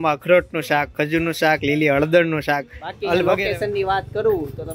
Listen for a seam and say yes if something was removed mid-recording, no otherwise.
yes